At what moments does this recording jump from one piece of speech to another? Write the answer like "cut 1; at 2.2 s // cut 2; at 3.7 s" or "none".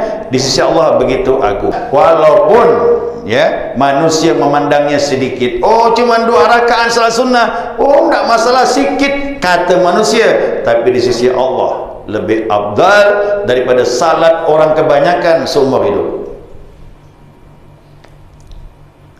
cut 1; at 1.8 s